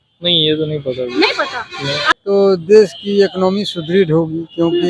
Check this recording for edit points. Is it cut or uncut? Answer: cut